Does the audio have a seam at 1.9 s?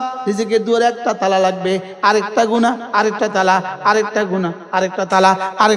no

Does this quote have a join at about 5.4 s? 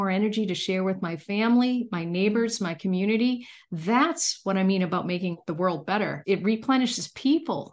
yes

